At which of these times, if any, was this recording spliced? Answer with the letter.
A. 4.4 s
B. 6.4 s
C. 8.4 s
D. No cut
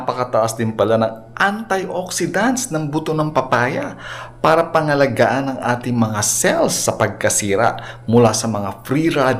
D